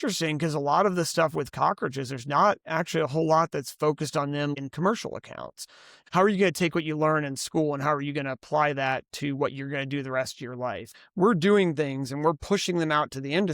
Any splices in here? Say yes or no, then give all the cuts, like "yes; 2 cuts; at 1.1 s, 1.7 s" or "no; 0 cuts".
yes; 3 cuts; at 4.5 s, 6.0 s, 11.0 s